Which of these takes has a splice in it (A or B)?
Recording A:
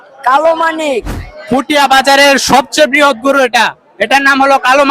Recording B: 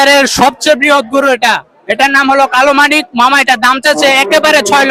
A